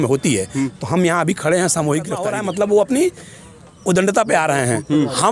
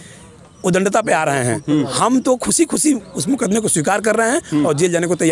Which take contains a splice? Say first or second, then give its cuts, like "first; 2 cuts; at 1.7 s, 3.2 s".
first; 1 cut; at 2.3 s